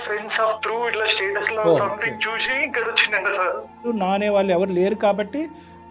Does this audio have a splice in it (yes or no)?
yes